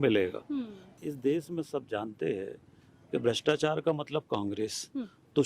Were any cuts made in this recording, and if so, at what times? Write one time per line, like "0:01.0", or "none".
0:01.0